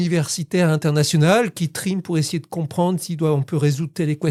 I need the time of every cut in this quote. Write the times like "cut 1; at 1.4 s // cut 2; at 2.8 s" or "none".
none